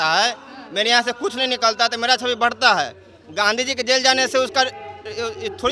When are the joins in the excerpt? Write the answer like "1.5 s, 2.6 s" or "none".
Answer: none